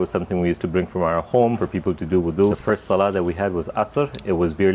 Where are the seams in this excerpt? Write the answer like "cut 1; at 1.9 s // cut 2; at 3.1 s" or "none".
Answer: cut 1; at 1.6 s // cut 2; at 2.6 s